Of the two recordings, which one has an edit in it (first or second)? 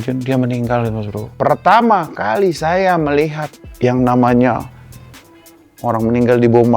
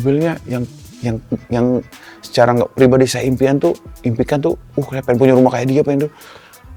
first